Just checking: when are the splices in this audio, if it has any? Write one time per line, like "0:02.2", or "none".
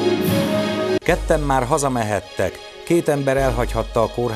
0:01.0